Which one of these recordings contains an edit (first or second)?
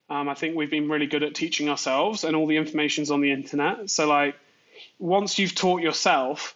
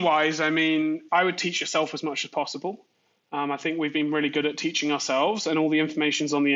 second